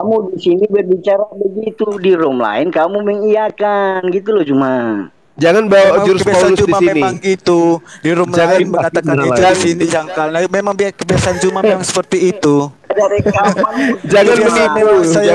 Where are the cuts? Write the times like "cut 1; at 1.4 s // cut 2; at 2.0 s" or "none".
none